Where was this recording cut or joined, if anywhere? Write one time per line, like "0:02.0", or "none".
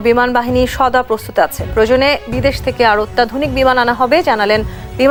none